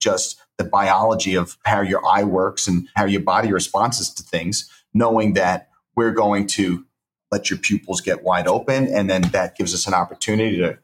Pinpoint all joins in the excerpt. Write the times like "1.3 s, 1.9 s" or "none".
1.5 s, 2.9 s, 7.2 s